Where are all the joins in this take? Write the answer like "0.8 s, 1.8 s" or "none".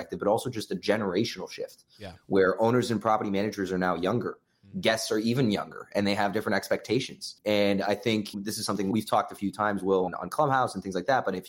7.3 s, 8.8 s, 10.1 s